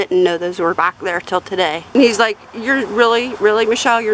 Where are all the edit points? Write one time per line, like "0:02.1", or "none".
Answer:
0:01.8